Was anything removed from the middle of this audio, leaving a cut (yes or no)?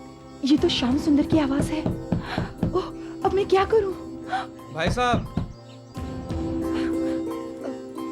no